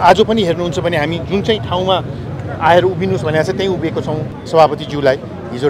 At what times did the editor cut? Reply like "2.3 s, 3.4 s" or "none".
4.3 s